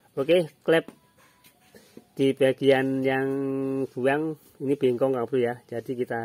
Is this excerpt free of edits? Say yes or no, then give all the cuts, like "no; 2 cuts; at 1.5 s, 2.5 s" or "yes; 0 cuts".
yes; 0 cuts